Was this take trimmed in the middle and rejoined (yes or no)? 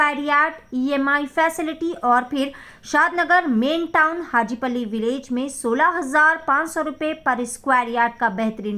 no